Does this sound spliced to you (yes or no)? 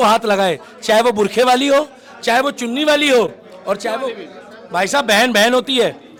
no